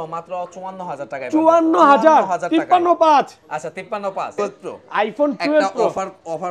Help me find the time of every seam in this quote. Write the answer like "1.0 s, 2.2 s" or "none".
4.3 s